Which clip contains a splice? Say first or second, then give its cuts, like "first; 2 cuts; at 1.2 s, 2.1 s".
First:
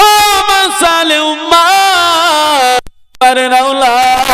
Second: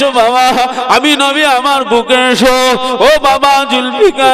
first; 1 cut; at 3.0 s